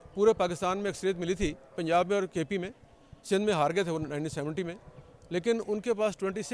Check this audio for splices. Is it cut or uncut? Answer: uncut